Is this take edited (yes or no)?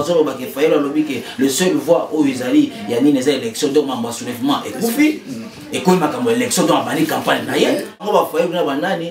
yes